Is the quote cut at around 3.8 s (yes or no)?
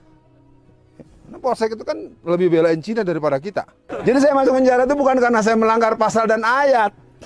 yes